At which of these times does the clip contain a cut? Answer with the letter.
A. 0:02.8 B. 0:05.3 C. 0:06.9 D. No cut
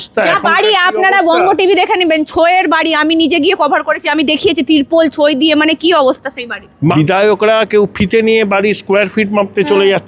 C